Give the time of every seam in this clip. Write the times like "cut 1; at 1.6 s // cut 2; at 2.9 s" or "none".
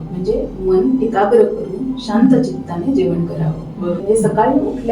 cut 1; at 4.0 s